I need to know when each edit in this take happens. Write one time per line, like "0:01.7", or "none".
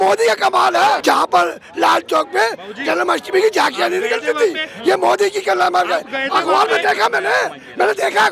0:01.0